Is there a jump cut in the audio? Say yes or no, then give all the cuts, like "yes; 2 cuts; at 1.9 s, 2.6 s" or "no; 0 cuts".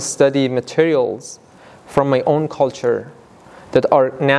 no; 0 cuts